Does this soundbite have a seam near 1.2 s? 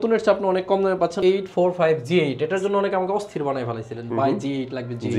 yes; 1 cut; at 1.2 s

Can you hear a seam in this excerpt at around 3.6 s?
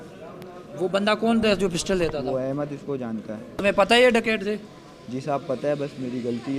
yes; 1 cut; at 3.6 s

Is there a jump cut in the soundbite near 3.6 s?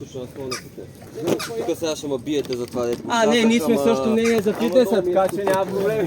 no; 1 cut; at 1.0 s

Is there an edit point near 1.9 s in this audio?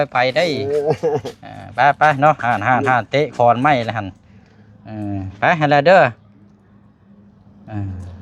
no; 0 cuts

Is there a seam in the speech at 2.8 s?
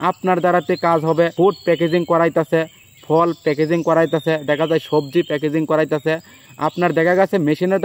no; 1 cut; at 1.3 s

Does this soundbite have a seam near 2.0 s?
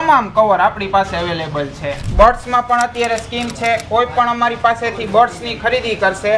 yes; 1 cut; at 2.0 s

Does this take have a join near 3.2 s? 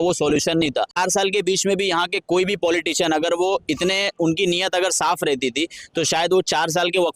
no; 1 cut; at 1.0 s

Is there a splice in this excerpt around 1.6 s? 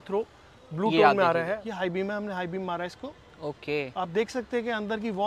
yes; 1 cut; at 1.6 s

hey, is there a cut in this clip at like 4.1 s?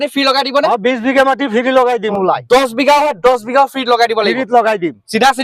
no; 1 cut; at 2.1 s

